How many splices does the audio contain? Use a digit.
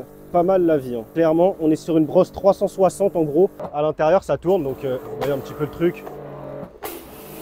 2